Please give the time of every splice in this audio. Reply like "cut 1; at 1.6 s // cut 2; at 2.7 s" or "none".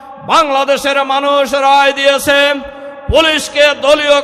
none